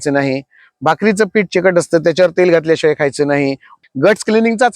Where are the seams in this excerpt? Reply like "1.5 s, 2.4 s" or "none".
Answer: 3.7 s